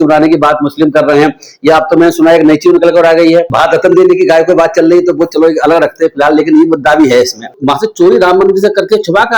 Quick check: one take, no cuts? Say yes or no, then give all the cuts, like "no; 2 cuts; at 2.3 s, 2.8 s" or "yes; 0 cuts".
yes; 0 cuts